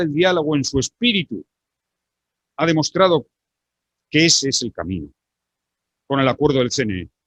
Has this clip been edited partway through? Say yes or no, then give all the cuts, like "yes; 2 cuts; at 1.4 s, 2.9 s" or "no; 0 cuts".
no; 0 cuts